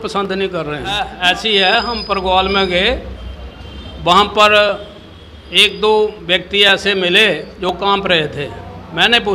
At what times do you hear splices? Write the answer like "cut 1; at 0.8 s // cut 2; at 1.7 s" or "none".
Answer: cut 1; at 1.1 s